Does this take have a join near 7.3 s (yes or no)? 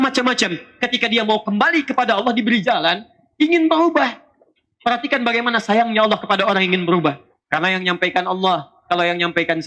yes